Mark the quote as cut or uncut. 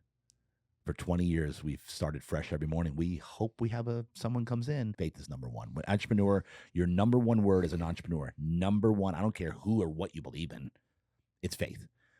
cut